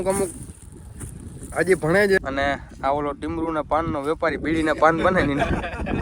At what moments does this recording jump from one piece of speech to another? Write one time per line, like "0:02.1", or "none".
0:02.2